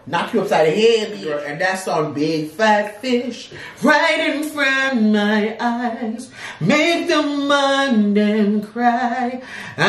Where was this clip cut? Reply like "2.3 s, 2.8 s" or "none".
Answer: 1.5 s